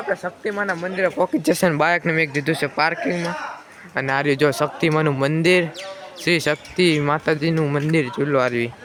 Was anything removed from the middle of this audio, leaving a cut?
no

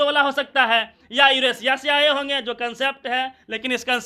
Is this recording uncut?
yes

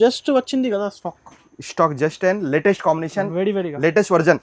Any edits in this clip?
no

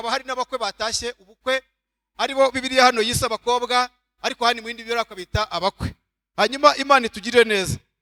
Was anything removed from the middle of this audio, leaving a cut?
no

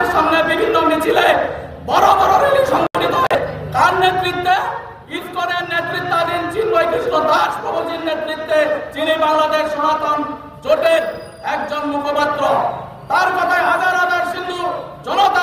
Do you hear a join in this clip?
yes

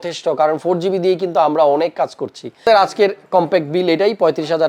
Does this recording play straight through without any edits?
no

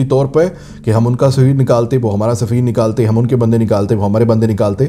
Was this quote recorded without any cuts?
yes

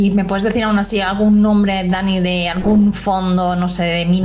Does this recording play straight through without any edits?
yes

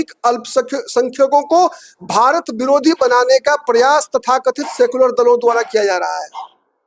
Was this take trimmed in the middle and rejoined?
no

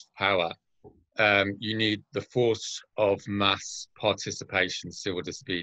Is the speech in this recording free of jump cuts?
yes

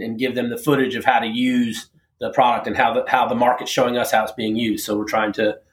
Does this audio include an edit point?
no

